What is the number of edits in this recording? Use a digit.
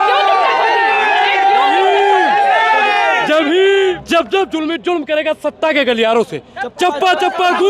1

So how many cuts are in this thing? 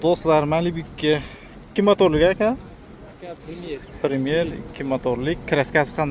0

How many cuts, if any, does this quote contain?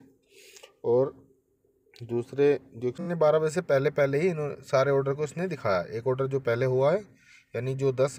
1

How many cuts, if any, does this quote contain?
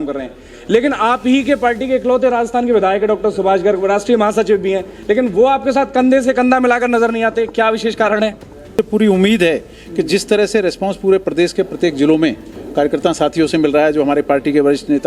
1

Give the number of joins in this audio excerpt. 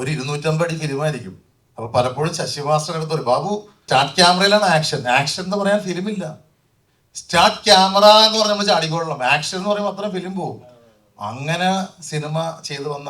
1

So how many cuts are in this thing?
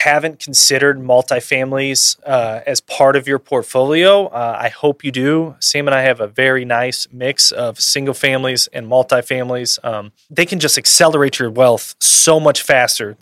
1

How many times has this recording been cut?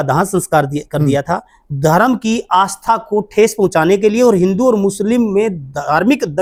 0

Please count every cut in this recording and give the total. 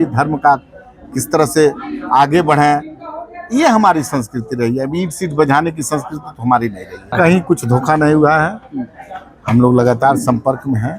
1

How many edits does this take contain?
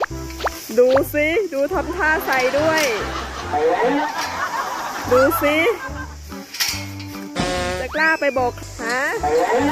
1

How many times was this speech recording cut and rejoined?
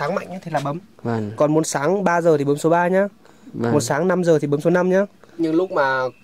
2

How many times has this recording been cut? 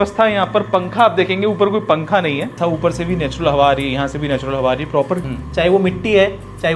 2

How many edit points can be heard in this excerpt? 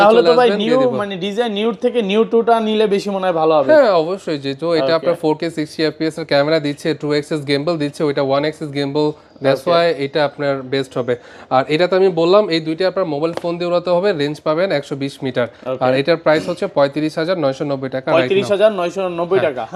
0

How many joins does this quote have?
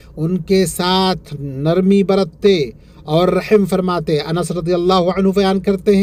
0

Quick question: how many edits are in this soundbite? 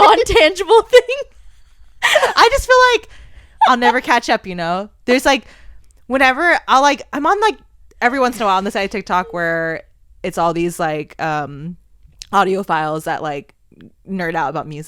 0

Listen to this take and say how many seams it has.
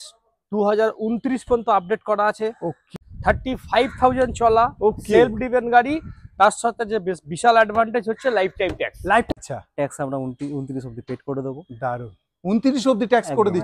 2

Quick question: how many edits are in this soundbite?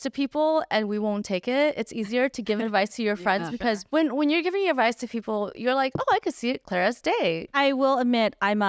2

